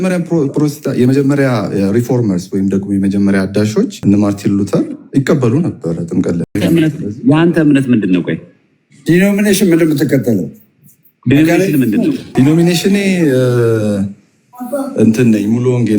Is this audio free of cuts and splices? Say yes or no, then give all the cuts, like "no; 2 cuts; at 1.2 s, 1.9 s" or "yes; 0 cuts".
no; 2 cuts; at 3.9 s, 12.2 s